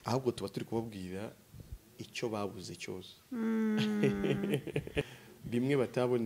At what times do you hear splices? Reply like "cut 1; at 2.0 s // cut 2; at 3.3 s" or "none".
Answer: cut 1; at 5.0 s